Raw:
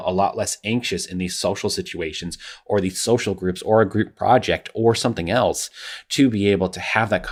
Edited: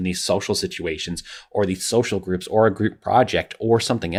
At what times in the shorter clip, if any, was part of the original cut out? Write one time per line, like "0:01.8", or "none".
none